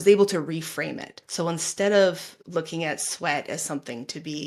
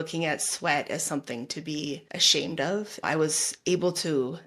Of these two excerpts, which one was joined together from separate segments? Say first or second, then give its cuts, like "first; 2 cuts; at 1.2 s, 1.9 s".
second; 1 cut; at 2.9 s